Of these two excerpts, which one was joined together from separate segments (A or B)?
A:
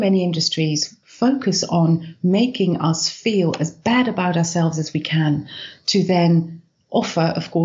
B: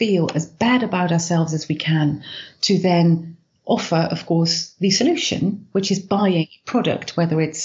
A